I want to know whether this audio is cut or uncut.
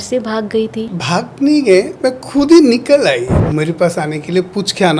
cut